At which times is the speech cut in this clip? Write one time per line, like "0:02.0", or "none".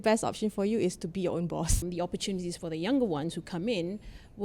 0:01.8